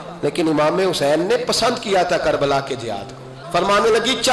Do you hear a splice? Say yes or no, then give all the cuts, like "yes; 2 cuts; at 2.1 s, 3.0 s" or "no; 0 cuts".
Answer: yes; 1 cut; at 3.3 s